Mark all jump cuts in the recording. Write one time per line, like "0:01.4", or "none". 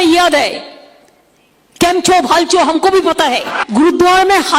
0:03.6